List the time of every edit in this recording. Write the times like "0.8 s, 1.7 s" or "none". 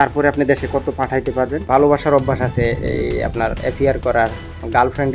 1.6 s